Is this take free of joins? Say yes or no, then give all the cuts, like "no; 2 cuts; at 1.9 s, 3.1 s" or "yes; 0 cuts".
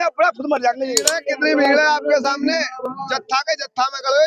no; 1 cut; at 1.1 s